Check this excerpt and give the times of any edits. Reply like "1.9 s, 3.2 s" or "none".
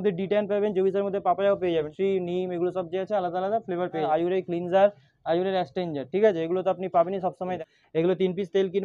1.9 s, 4.1 s, 7.6 s